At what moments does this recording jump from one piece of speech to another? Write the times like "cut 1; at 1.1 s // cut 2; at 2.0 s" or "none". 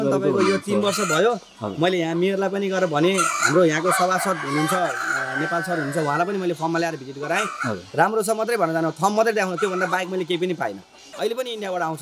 cut 1; at 11.0 s